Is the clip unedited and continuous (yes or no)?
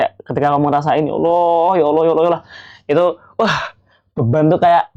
yes